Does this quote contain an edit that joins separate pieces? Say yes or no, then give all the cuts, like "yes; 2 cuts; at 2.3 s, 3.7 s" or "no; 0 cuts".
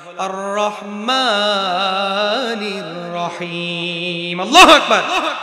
no; 0 cuts